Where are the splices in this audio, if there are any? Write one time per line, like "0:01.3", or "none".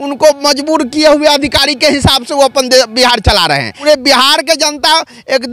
0:03.7